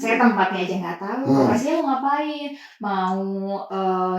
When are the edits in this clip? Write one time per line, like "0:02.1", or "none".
0:01.7

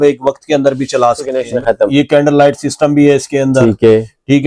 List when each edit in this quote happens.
0:01.4

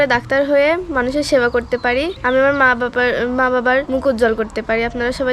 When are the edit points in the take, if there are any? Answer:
0:02.2
0:03.9

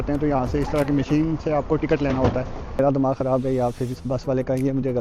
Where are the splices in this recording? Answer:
0:02.6

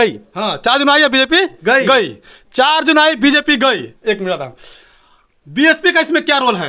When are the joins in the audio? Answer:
none

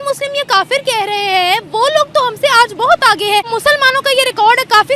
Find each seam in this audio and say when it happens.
0:03.5

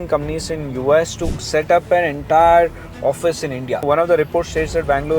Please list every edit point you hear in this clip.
0:03.8

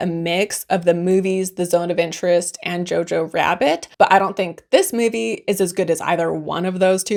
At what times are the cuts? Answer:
none

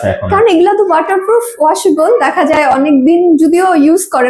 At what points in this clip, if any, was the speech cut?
none

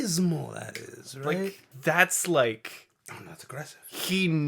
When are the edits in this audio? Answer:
0:01.7

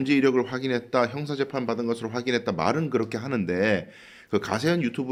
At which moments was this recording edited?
none

